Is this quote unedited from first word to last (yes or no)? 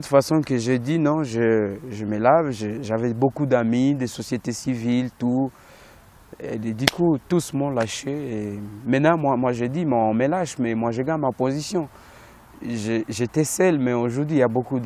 yes